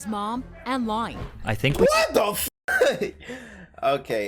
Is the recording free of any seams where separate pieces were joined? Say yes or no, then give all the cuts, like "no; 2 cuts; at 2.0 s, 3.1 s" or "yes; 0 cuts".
yes; 0 cuts